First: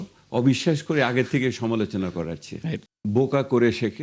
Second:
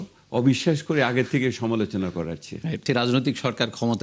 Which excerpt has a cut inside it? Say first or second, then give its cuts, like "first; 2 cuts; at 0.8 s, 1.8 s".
first; 1 cut; at 2.8 s